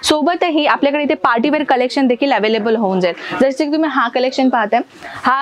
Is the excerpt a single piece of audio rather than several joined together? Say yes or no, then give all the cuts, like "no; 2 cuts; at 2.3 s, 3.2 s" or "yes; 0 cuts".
yes; 0 cuts